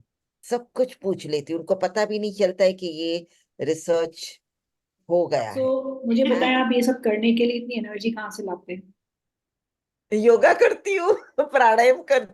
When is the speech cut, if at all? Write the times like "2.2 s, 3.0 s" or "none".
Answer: 5.6 s